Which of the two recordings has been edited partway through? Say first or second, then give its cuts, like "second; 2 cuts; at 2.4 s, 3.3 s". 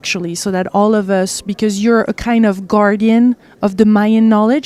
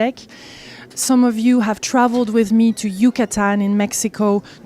second; 1 cut; at 2.2 s